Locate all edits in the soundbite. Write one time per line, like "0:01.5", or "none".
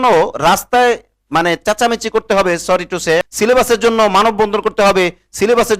0:03.2

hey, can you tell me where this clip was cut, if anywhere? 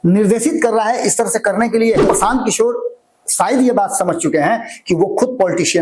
0:02.0

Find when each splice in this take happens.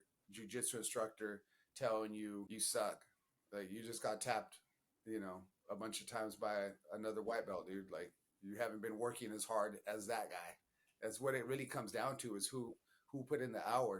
0:02.5

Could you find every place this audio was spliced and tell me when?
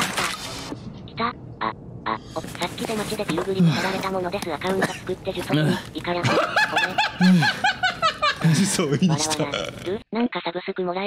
0:00.8
0:02.5
0:08.3

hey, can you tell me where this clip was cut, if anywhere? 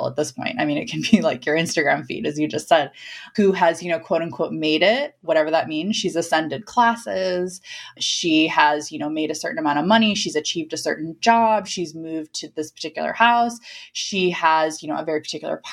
0:03.3
0:05.2

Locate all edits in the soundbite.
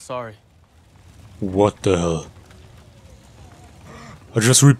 none

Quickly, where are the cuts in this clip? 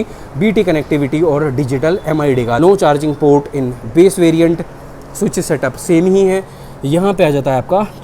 0:02.6

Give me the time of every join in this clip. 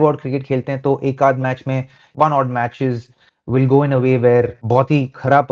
0:04.6

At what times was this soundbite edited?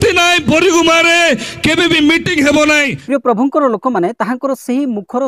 0:02.9

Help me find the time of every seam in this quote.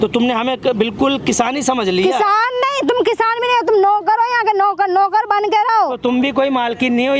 none

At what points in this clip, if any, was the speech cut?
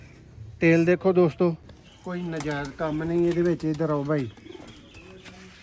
0:01.3

